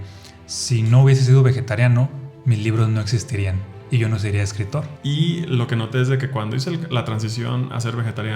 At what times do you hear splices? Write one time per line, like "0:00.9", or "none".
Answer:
0:04.9

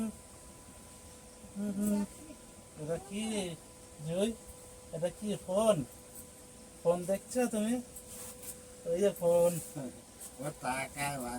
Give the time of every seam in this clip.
none

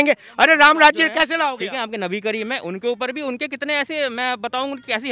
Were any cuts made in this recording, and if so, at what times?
0:01.5

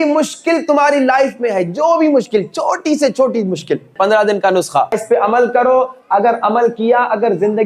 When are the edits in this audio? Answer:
0:03.9
0:05.0

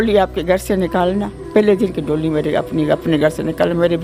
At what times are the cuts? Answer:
0:01.3

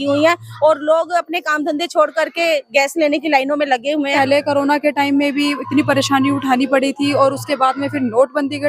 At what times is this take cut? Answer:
0:04.1

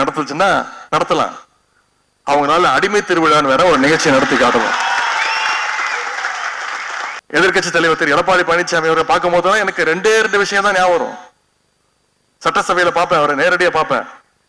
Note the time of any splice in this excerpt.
0:07.2

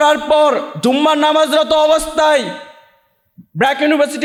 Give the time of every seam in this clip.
none

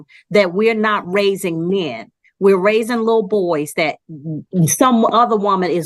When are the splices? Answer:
none

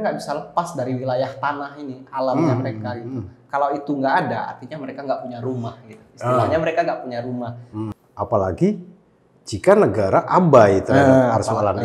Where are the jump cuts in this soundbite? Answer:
0:07.6

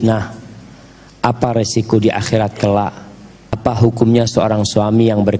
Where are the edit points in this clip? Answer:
0:03.6

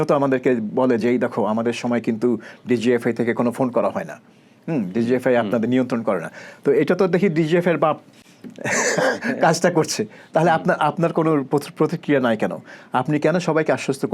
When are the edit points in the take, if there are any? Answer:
none

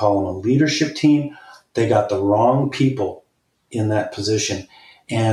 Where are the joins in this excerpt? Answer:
none

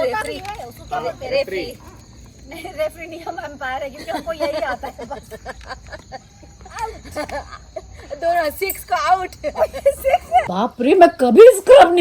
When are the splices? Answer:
0:10.5

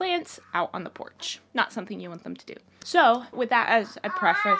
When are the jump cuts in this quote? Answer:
none

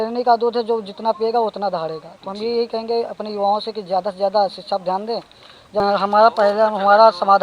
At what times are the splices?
0:05.8

